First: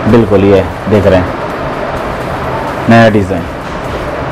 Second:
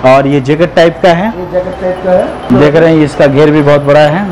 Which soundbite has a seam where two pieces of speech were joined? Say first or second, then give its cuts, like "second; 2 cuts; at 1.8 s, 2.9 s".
second; 1 cut; at 2.4 s